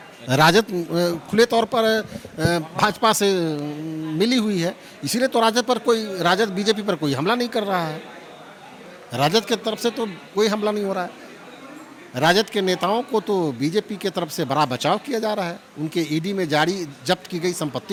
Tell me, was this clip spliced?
no; 0 cuts

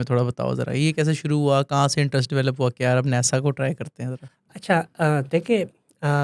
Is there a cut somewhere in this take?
no; 0 cuts

